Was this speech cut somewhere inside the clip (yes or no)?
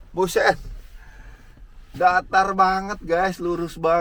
no